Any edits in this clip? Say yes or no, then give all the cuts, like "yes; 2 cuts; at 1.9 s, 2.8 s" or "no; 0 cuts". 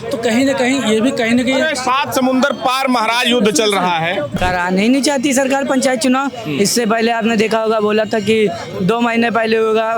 yes; 1 cut; at 4.4 s